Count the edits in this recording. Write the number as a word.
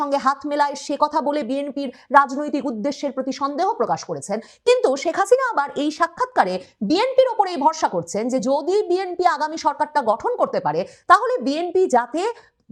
zero